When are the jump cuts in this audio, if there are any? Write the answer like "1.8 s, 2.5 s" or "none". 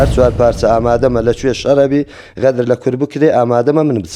none

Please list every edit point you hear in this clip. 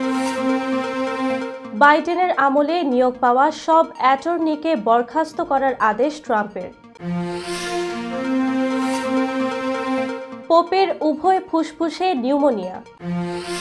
1.6 s

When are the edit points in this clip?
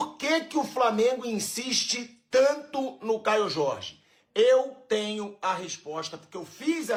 none

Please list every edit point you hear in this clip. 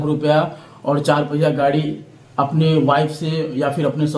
none

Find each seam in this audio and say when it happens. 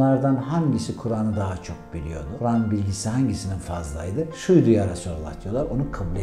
2.3 s, 4.4 s

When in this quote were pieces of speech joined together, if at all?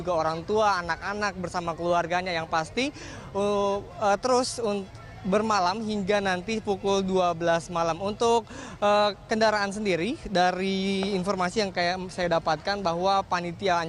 none

